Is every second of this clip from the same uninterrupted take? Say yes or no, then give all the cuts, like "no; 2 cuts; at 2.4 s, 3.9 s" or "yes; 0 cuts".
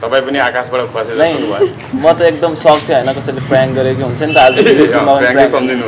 yes; 0 cuts